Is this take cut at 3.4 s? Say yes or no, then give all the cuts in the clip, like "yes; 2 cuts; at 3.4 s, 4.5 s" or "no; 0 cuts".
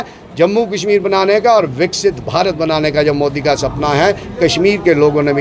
no; 0 cuts